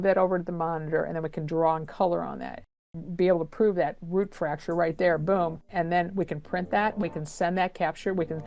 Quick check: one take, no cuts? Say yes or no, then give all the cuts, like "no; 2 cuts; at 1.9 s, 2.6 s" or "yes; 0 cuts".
no; 2 cuts; at 2.8 s, 5.6 s